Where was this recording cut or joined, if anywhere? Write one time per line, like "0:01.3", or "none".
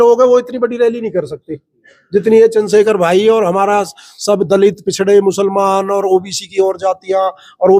none

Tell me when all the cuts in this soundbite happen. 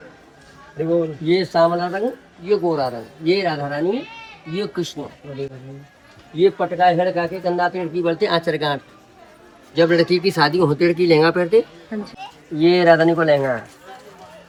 none

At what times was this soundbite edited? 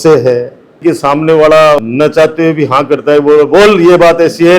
0:01.8

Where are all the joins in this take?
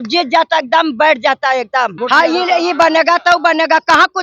0:02.0

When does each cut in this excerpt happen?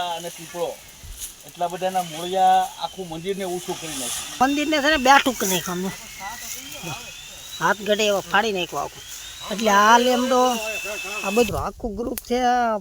0:04.4
0:11.5

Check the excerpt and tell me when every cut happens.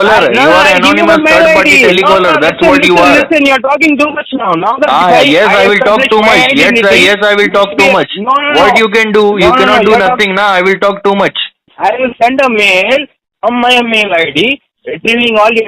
0:11.7

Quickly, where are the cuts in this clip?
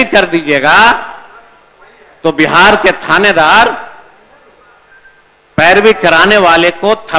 none

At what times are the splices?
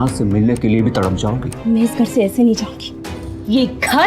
0:01.5

